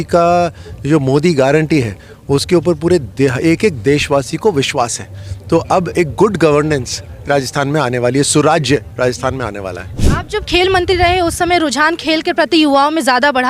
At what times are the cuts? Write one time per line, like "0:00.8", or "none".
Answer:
0:09.9

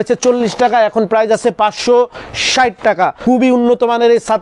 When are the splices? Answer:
0:03.2

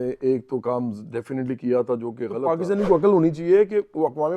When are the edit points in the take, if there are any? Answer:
0:02.5

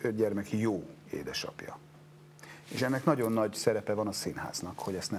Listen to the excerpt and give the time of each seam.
none

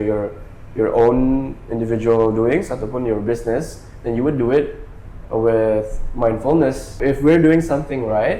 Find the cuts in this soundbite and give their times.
0:07.0

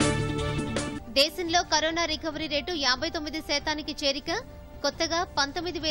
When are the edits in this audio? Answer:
0:01.0

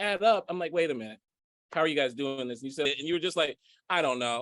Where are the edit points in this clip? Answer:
0:02.8

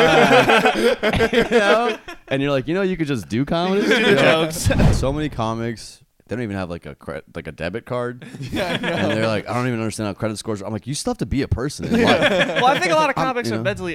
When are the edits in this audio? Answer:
0:04.9
0:06.2

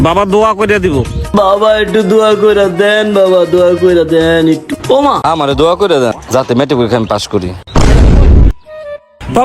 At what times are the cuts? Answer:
0:05.2

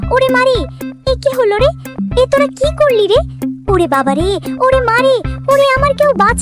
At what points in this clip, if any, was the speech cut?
none

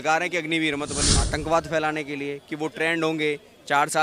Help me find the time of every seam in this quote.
0:01.2

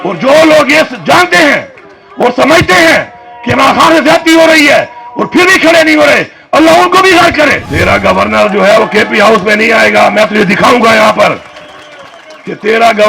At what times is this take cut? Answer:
0:07.7

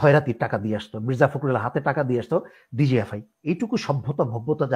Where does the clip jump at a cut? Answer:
0:03.4

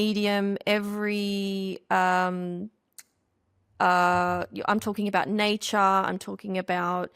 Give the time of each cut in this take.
none

